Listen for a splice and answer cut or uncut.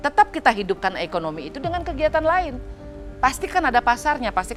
uncut